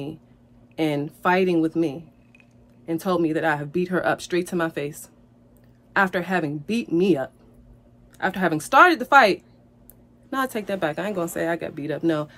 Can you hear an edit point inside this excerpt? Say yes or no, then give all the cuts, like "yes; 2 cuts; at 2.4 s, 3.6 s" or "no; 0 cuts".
no; 0 cuts